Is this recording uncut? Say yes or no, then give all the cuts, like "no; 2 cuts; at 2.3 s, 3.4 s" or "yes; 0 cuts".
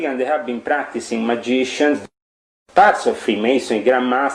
no; 1 cut; at 2.0 s